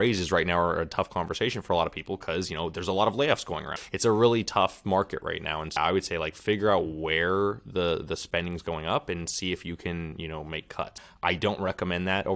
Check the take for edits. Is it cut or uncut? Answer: cut